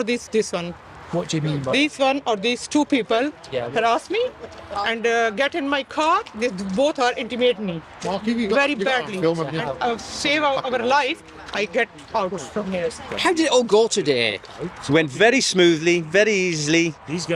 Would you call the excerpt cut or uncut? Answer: cut